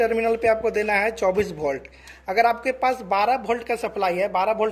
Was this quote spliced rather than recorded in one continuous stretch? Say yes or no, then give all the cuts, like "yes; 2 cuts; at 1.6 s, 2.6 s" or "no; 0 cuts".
no; 0 cuts